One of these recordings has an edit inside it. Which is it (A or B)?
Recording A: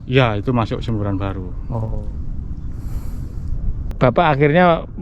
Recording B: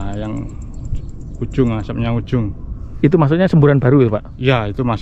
A